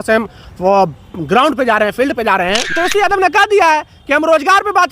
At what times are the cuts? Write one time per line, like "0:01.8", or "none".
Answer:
0:02.7